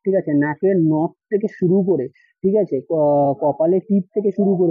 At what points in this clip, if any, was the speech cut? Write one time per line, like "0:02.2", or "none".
none